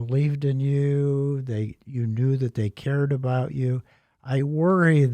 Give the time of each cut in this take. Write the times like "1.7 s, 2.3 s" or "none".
none